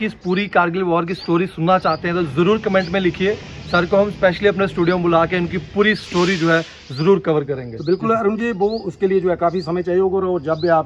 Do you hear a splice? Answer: no; 0 cuts

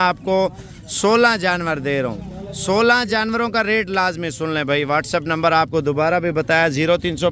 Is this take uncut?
yes; 0 cuts

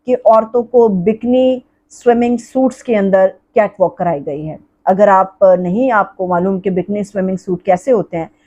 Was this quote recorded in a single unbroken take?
yes; 0 cuts

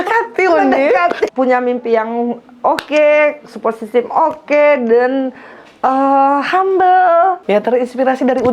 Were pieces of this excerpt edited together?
yes; 2 cuts; at 1.3 s, 7.4 s

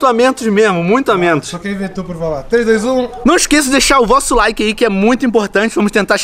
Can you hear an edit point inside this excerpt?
yes; 1 cut; at 3.2 s

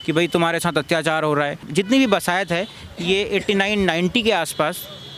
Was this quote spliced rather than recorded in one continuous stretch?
yes; 1 cut; at 1.6 s

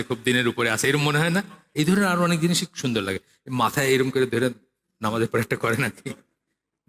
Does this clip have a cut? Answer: yes; 1 cut; at 1.6 s

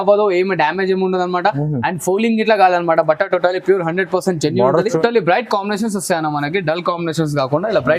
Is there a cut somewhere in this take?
yes; 1 cut; at 5.0 s

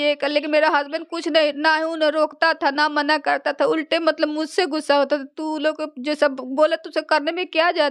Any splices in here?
no; 0 cuts

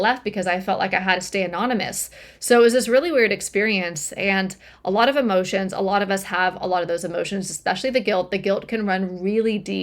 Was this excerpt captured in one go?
yes; 0 cuts

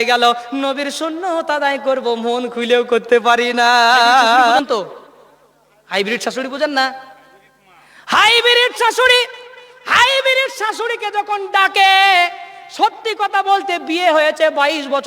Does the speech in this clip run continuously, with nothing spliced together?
no; 1 cut; at 4.6 s

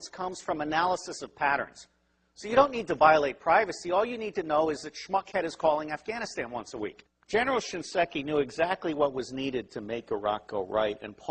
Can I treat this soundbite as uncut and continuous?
yes; 0 cuts

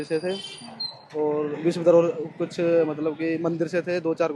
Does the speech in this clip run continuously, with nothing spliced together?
yes; 0 cuts

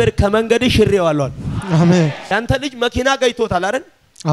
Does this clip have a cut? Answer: yes; 1 cut; at 2.3 s

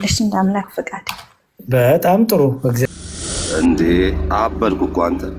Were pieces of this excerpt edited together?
yes; 1 cut; at 2.9 s

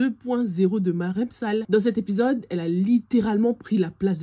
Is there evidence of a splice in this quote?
no; 0 cuts

